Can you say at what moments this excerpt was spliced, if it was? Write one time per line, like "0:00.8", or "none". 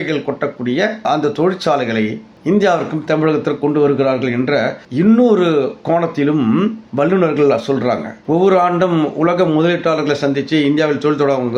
0:08.1